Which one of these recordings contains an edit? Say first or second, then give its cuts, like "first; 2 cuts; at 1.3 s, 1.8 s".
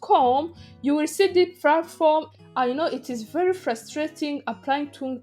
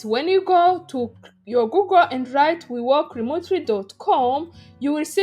first; 1 cut; at 2.3 s